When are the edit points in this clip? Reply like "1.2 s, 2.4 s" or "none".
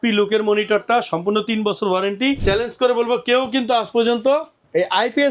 2.4 s